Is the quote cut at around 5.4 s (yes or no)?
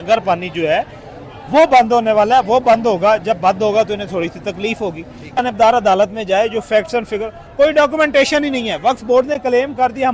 yes